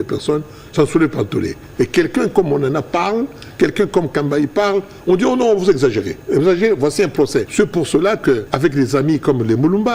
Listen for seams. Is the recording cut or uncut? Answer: cut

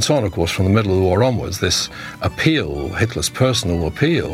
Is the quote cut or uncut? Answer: uncut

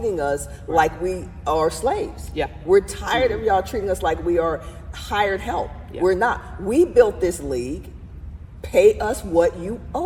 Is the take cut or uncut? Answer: uncut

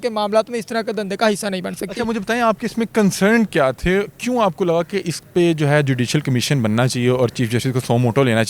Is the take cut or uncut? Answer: uncut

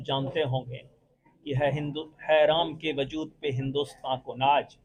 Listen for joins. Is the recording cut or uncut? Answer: uncut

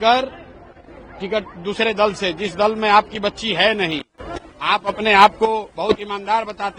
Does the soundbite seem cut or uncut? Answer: uncut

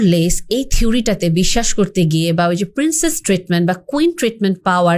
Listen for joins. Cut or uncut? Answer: uncut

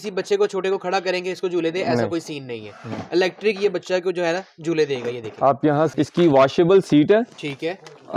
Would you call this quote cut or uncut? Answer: cut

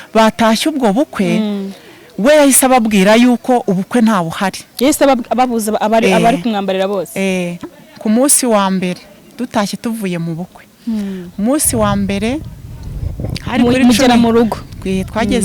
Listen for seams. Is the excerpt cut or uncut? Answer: cut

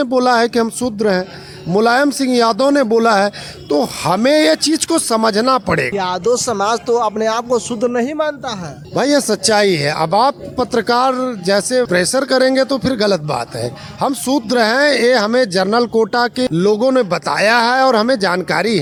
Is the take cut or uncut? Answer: uncut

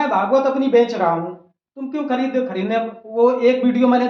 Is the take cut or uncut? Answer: uncut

